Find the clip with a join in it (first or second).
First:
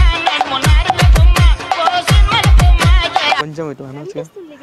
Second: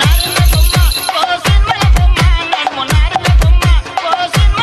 first